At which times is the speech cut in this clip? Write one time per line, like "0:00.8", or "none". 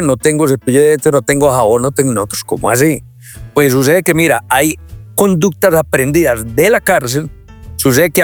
none